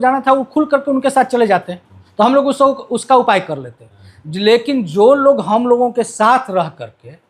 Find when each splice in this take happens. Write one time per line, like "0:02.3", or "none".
0:02.0